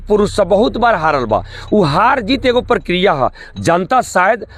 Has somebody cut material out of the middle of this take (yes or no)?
no